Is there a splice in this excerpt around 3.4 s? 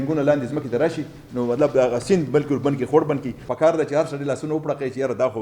yes; 1 cut; at 3.4 s

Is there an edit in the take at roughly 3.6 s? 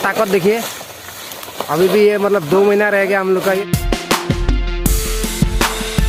no; 0 cuts

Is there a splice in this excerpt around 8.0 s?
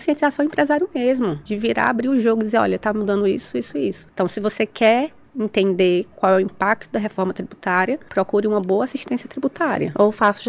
yes; 4 cuts; at 1.4 s, 4.0 s, 5.2 s, 8.0 s

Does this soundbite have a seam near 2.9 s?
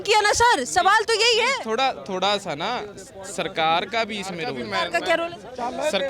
no; 1 cut; at 4.6 s

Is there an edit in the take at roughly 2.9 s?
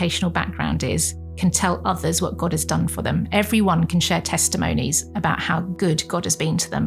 yes; 2 cuts; at 2.9 s, 5.7 s

